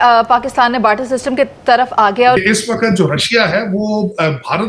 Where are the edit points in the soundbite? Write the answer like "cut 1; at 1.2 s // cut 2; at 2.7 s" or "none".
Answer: cut 1; at 2.4 s